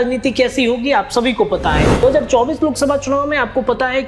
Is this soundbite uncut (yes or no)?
no